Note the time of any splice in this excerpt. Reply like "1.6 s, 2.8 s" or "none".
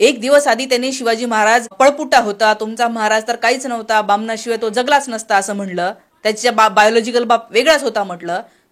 1.7 s